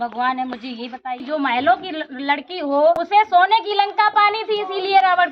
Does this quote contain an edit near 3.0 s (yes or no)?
yes